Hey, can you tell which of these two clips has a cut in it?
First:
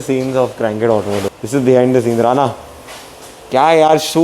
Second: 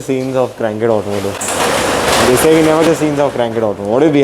first; 1 cut; at 1.3 s

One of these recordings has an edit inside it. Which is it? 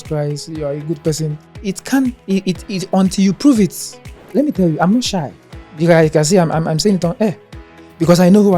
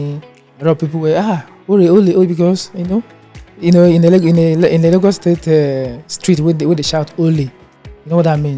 first; 2 cuts; at 1.5 s, 4.2 s

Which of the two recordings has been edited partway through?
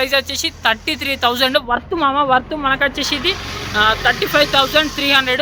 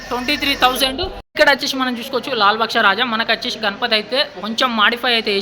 second; 1 cut; at 1.3 s

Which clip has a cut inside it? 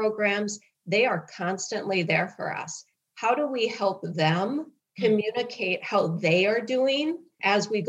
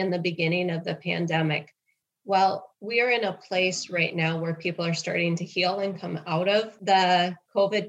second; 2 cuts; at 2.7 s, 6.7 s

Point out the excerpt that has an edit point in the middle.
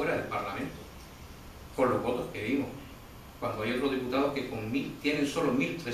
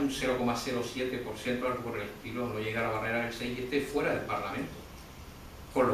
second; 1 cut; at 1.0 s

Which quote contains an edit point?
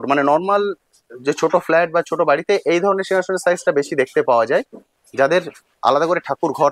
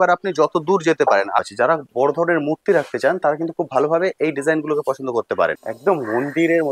second; 2 cuts; at 1.4 s, 5.7 s

